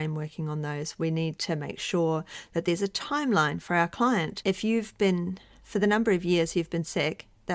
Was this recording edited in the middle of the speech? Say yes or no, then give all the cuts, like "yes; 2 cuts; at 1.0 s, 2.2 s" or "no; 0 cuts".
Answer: no; 0 cuts